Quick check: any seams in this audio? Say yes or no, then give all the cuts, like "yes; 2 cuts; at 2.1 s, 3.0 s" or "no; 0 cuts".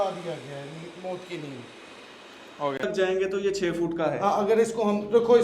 yes; 1 cut; at 2.8 s